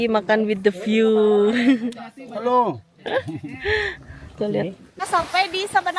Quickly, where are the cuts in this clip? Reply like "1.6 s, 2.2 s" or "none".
5.0 s

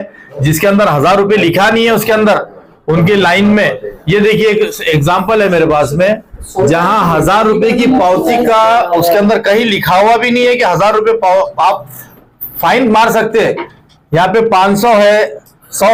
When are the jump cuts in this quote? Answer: none

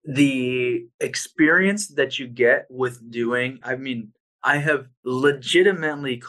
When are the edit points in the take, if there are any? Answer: 0.9 s, 3.6 s, 4.9 s

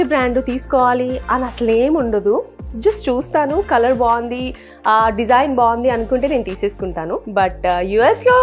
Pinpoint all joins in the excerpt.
none

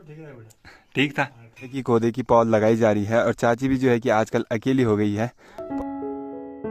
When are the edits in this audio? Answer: 1.8 s, 5.6 s

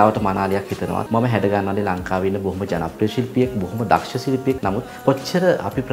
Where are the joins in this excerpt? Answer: 1.0 s, 4.6 s

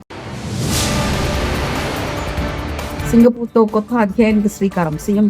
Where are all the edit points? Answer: 3.0 s

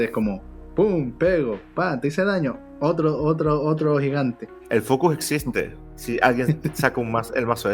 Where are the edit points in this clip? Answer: 4.5 s

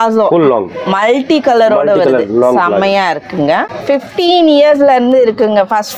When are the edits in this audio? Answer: 3.7 s

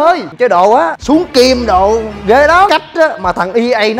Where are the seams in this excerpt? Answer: 0.9 s, 2.7 s

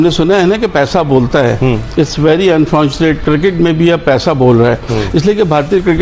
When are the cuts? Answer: none

